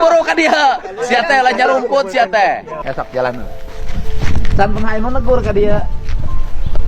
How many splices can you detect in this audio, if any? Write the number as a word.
one